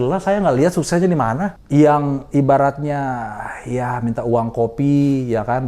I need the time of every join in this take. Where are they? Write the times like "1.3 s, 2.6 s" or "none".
1.6 s